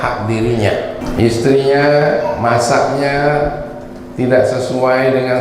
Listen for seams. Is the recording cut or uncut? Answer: cut